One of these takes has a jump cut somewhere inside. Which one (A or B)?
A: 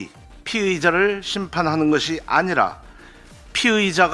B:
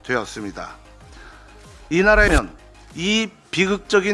B